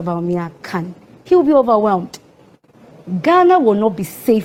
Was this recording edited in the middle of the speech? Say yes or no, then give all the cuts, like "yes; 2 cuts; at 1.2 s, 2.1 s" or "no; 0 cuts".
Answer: no; 0 cuts